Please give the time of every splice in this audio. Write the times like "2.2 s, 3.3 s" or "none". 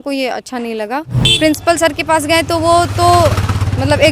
1.2 s

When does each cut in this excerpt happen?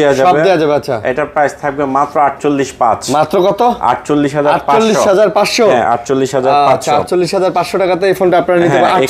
none

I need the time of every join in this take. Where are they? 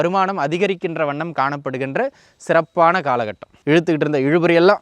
3.5 s

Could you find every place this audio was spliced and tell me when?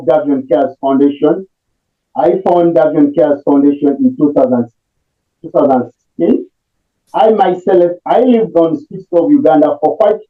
none

